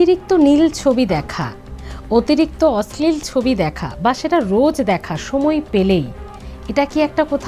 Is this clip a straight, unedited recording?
yes; 0 cuts

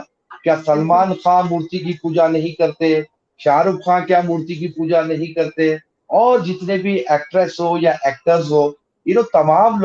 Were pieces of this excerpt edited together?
no; 0 cuts

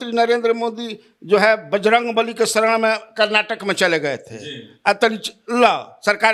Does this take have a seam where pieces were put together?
no; 0 cuts

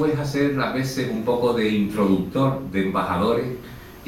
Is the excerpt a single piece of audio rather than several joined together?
no; 1 cut; at 3.1 s

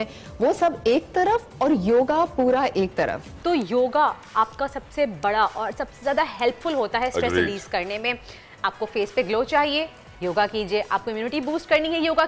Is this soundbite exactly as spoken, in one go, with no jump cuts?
no; 1 cut; at 3.3 s

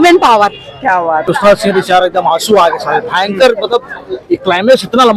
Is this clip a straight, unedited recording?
no; 1 cut; at 1.3 s

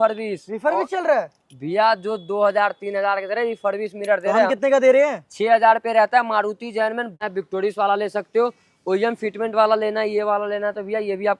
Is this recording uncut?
no; 1 cut; at 7.1 s

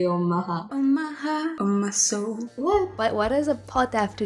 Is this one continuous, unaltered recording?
no; 1 cut; at 2.5 s

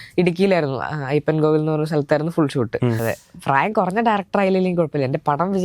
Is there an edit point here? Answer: yes; 1 cut; at 3.0 s

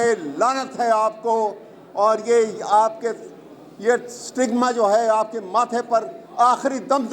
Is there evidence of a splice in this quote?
no; 0 cuts

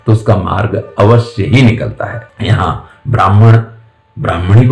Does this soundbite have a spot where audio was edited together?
no; 0 cuts

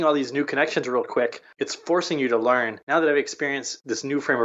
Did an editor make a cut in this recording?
yes; 2 cuts; at 1.4 s, 2.8 s

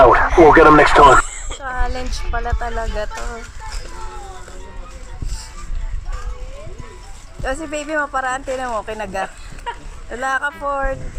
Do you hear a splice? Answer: yes; 1 cut; at 1.3 s

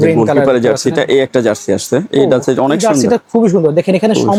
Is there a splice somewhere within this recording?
no; 0 cuts

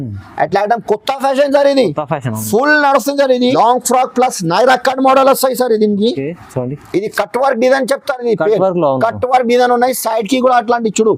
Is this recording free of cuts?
no; 1 cut; at 3.5 s

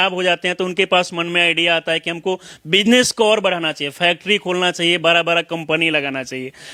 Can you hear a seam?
no; 0 cuts

